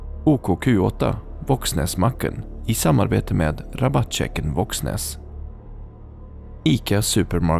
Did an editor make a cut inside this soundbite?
no; 0 cuts

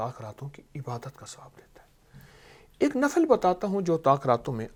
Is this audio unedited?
yes; 0 cuts

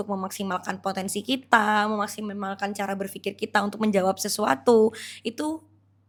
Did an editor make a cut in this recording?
no; 0 cuts

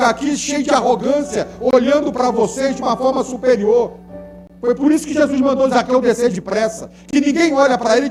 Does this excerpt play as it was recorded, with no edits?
yes; 0 cuts

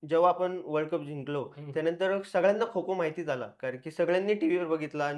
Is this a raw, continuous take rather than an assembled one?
yes; 0 cuts

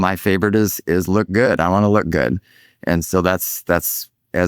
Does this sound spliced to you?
no; 0 cuts

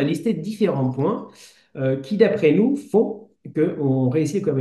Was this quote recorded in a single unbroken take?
yes; 0 cuts

